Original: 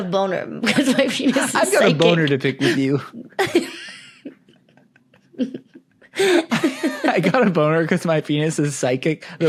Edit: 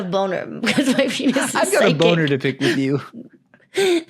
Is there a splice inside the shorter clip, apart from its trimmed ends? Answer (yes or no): yes